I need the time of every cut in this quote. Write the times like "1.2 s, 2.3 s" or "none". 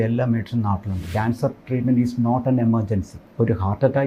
1.0 s, 3.2 s